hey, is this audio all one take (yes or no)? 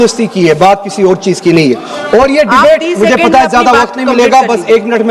yes